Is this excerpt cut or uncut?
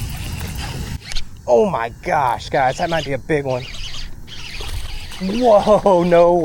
uncut